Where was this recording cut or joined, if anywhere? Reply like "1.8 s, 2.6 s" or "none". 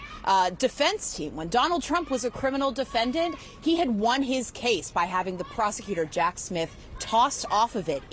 none